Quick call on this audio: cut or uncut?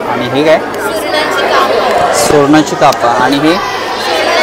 uncut